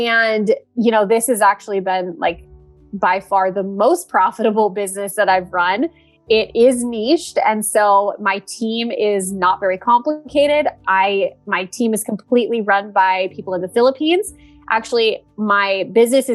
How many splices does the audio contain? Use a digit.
0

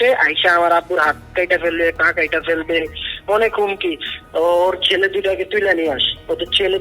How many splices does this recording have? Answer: 1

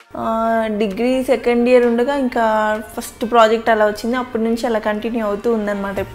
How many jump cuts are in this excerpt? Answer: 0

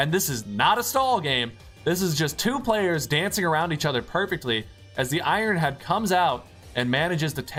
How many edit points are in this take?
0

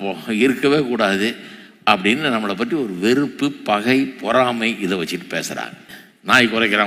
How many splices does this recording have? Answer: 1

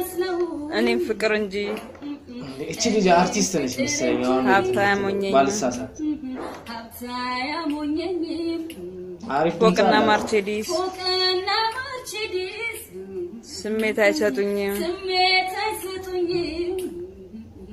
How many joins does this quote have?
0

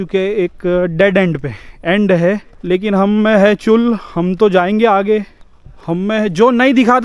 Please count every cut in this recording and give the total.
1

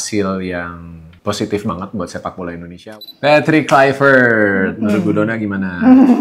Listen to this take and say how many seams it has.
1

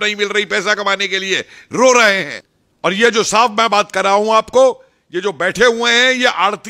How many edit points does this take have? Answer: 1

